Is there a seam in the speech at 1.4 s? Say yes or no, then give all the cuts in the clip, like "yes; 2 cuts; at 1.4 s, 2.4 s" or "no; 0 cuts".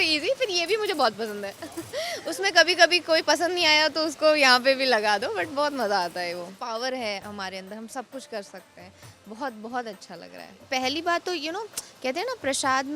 no; 2 cuts; at 6.5 s, 10.6 s